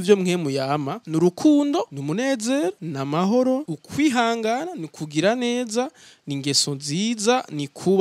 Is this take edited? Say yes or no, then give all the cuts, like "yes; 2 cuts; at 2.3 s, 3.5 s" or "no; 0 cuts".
yes; 4 cuts; at 1.0 s, 2.0 s, 2.9 s, 3.8 s